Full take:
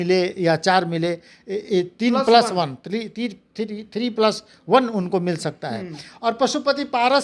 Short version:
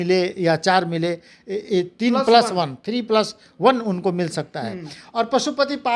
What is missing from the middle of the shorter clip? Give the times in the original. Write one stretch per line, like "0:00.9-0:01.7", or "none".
0:02.8-0:03.9